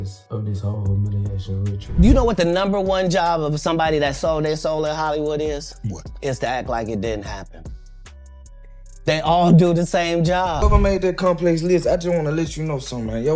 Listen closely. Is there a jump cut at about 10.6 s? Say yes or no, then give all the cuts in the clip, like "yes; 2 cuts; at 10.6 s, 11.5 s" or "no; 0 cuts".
yes; 2 cuts; at 1.8 s, 10.6 s